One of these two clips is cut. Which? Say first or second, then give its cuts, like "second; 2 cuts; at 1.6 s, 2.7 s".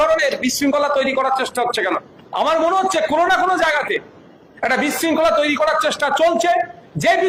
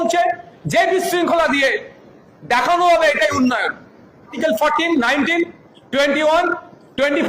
second; 1 cut; at 4.3 s